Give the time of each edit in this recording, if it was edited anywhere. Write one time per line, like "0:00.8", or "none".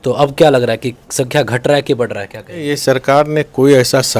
0:02.6